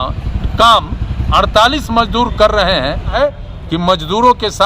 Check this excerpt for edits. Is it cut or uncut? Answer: cut